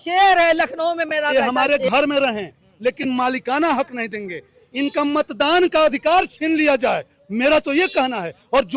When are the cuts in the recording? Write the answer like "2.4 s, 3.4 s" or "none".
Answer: 1.3 s